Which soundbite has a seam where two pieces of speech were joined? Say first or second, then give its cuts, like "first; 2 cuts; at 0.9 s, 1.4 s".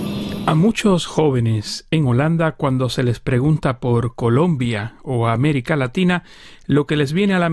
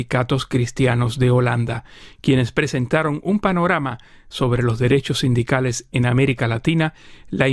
second; 1 cut; at 5.1 s